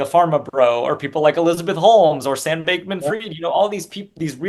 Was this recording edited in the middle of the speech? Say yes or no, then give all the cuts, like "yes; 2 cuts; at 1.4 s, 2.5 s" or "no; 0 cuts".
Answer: no; 0 cuts